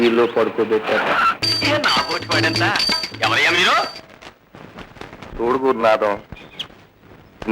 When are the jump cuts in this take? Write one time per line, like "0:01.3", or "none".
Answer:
0:01.5